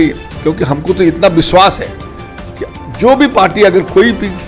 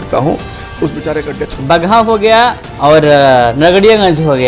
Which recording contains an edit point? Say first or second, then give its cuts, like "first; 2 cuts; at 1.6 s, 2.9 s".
second; 1 cut; at 1.5 s